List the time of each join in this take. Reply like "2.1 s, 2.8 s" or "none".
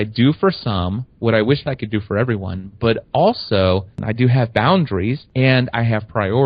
4.0 s, 5.2 s